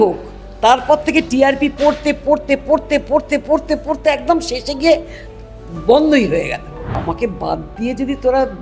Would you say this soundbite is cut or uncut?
cut